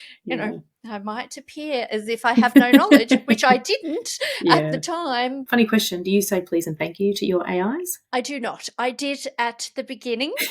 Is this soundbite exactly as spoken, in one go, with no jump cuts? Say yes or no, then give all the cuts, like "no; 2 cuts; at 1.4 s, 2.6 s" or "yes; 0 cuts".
no; 1 cut; at 5.4 s